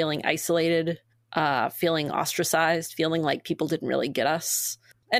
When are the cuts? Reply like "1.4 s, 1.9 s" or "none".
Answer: none